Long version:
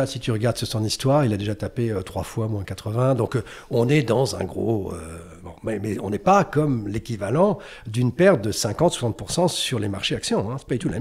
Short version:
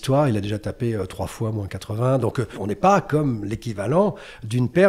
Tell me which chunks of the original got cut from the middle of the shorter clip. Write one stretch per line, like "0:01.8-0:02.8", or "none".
0:03.5-0:06.0